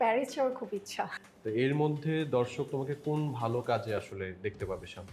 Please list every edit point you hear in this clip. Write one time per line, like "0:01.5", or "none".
0:01.2

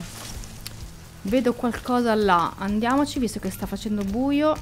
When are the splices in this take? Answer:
none

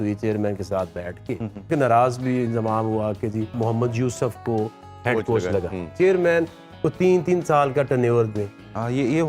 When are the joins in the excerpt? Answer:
0:01.7
0:03.6
0:05.9

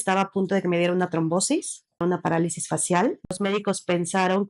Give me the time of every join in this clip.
0:02.0
0:03.3

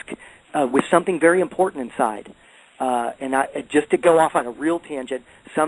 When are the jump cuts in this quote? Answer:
0:04.5

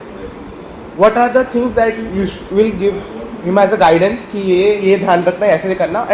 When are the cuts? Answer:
none

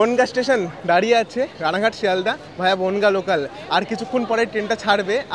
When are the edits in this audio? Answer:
none

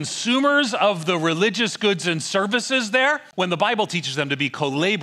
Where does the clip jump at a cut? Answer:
0:03.2

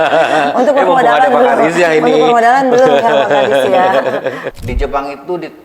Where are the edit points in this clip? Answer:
0:04.4

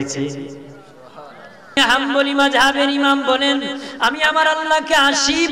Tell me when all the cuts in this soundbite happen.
0:01.8

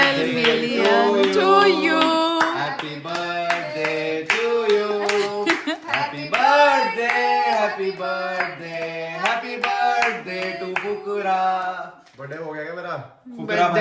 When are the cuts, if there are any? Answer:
none

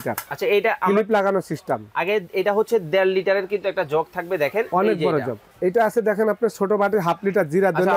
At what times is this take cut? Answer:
0:05.4

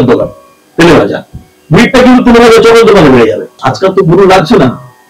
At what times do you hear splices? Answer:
0:03.6

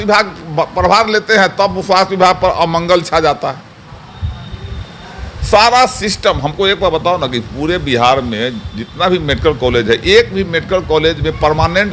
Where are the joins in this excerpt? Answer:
none

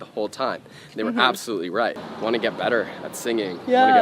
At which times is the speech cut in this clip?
0:02.1

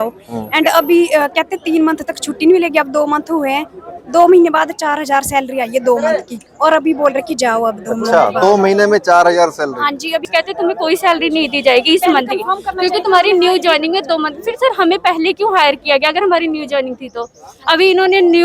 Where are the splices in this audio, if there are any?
0:10.2

